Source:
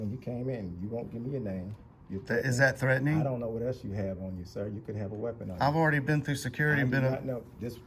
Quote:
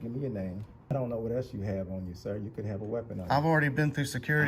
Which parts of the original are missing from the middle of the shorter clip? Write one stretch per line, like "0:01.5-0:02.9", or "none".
0:02.0-0:03.2

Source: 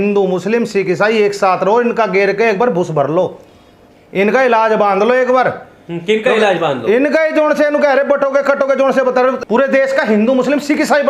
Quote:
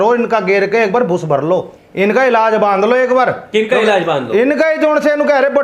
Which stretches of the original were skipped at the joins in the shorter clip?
0:03.4-0:04.0
0:05.6-0:06.0

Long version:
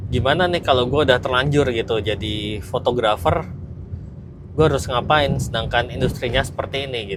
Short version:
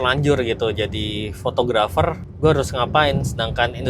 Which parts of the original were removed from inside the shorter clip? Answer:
0:03.5-0:04.4

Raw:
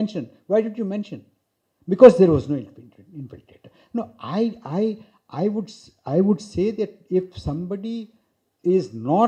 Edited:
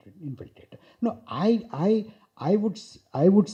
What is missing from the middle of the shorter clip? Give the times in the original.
none

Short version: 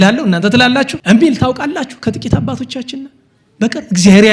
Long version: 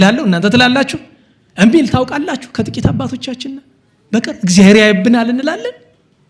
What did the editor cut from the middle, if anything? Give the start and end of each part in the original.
0:01.0-0:01.5

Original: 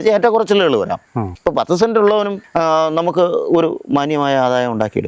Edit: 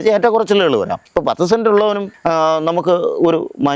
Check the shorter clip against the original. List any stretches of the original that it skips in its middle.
0:01.0-0:01.3

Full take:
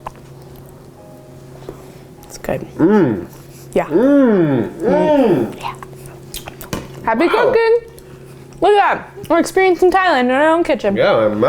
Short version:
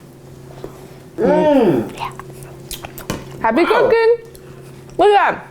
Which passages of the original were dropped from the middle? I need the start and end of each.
0:02.1-0:04.7

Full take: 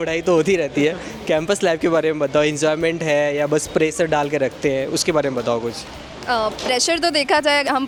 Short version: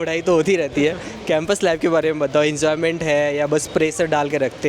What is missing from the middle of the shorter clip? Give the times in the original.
none

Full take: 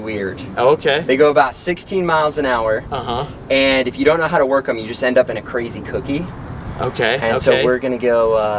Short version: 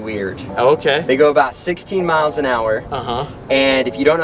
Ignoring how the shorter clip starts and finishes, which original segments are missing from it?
none

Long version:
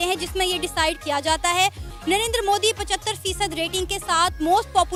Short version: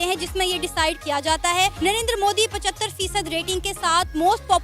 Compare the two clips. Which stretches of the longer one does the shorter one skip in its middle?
0:01.8-0:02.0

